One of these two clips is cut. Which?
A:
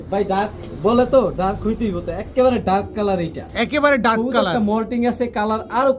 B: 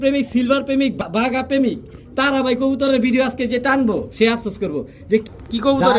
B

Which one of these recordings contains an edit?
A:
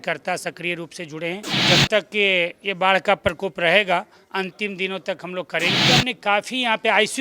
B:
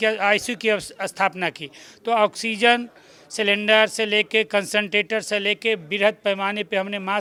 A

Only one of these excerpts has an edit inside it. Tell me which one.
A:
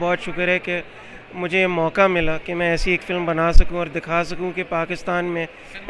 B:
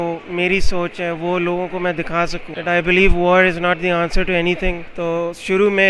B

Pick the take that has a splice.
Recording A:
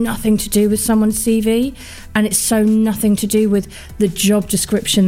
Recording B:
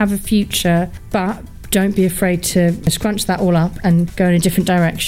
B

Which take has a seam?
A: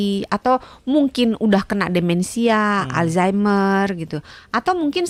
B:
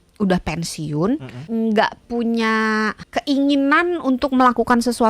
B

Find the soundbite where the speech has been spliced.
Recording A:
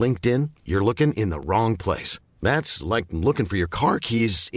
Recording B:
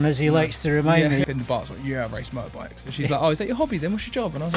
B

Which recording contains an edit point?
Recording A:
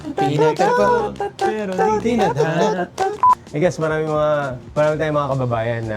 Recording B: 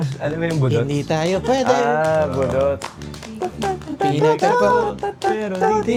A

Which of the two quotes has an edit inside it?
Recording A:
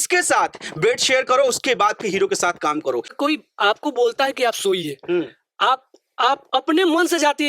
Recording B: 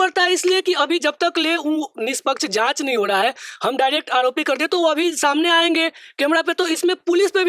A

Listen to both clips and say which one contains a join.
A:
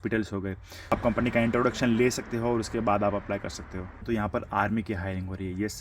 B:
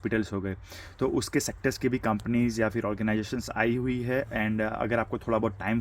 A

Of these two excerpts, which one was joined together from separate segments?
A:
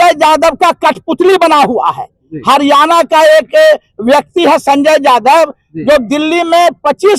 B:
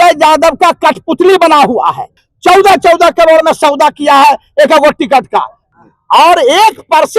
B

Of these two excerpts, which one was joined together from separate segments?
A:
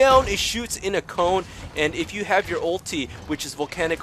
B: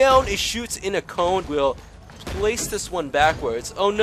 B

